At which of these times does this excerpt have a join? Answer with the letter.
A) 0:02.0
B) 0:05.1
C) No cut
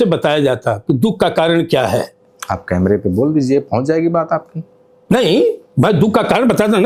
C